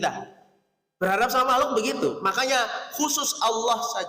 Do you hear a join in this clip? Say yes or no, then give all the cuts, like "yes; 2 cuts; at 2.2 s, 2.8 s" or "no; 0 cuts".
no; 0 cuts